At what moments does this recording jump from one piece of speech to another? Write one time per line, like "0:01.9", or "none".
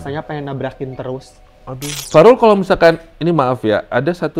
0:02.0

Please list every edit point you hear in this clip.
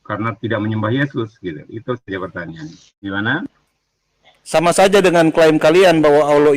0:02.9

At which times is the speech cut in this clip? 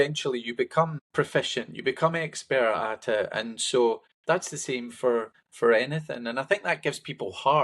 0:01.0
0:04.1
0:05.4

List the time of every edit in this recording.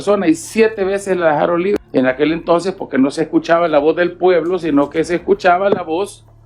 0:01.8

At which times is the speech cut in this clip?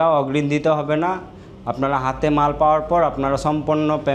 none

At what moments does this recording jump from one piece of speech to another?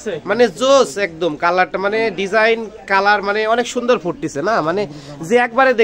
none

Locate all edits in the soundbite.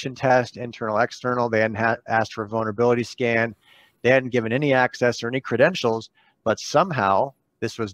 none

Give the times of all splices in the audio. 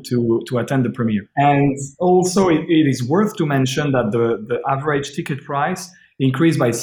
0:01.3

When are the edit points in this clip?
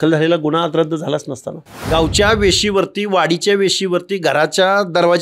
0:01.8

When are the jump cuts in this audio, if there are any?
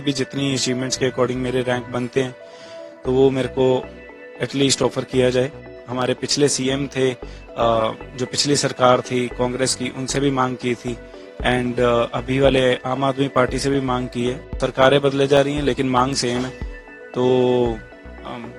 0:05.7
0:14.5

